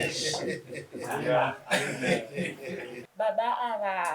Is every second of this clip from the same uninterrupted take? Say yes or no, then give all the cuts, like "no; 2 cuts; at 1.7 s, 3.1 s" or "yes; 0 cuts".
no; 1 cut; at 3.0 s